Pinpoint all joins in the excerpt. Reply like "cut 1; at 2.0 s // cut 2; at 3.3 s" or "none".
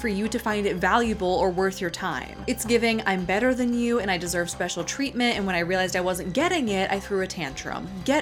none